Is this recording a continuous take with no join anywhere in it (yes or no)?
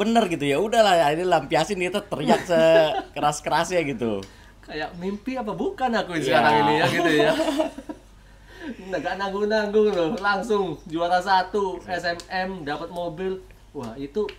yes